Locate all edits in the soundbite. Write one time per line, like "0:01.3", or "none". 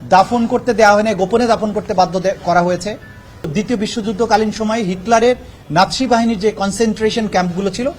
0:03.5